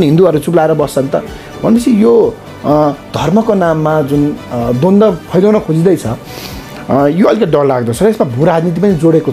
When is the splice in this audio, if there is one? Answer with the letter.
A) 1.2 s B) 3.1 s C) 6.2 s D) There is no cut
D